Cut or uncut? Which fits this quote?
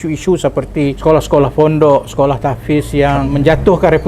cut